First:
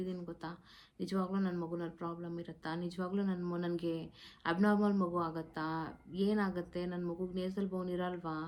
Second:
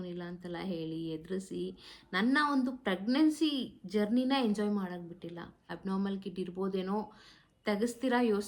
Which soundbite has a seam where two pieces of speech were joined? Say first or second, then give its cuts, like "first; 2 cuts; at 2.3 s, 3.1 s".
second; 1 cut; at 5.7 s